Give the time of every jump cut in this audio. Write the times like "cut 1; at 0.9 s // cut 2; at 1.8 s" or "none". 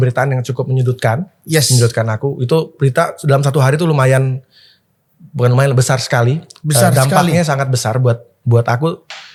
none